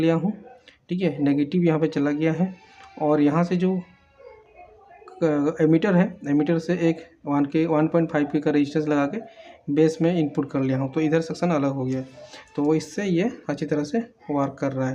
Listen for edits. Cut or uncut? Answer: uncut